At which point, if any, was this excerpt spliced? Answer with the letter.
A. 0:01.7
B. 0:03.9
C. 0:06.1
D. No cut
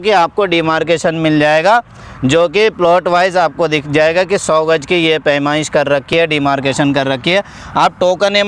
D